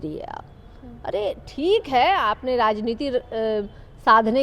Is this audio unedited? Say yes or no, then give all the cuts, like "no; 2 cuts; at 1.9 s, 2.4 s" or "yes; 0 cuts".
yes; 0 cuts